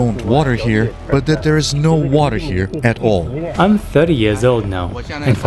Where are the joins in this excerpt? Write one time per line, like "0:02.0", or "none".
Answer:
0:01.0
0:03.4